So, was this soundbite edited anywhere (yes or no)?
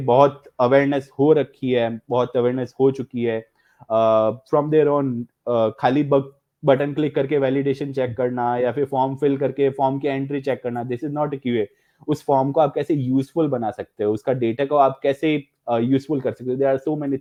no